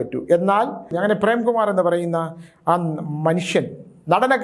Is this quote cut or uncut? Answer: cut